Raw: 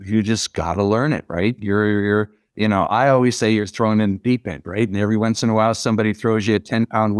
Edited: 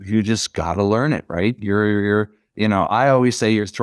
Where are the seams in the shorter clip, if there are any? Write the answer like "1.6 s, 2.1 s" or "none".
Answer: none